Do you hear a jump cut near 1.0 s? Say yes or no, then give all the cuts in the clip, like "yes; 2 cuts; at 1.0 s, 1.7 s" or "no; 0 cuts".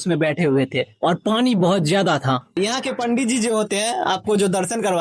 no; 1 cut; at 2.5 s